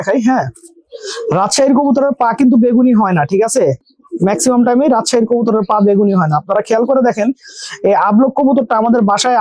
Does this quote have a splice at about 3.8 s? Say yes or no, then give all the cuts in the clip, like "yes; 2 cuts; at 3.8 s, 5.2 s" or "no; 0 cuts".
no; 0 cuts